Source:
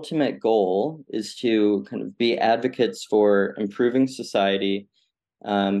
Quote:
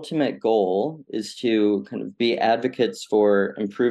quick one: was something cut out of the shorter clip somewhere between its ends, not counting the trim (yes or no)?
no